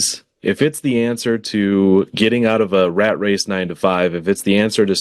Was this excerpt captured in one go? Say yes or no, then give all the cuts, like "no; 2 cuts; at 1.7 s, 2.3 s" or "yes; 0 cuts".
yes; 0 cuts